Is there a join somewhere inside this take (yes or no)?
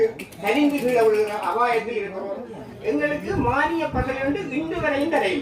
yes